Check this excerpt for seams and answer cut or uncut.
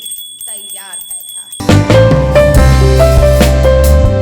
cut